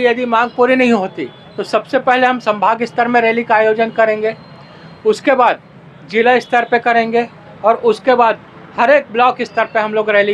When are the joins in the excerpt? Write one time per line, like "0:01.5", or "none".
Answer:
none